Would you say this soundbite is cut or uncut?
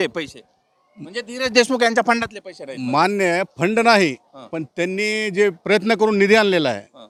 uncut